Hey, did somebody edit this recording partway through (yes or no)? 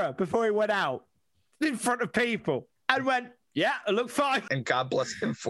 yes